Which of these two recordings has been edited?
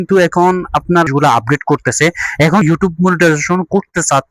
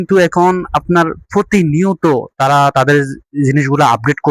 first; 2 cuts; at 1.1 s, 2.6 s

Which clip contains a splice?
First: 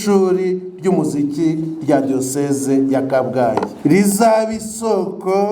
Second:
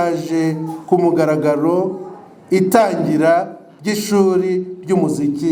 first; 1 cut; at 3.7 s

